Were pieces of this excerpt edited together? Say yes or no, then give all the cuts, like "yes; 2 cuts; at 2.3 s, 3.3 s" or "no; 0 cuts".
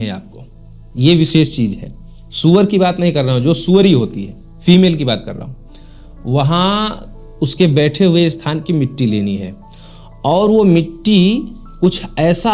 no; 0 cuts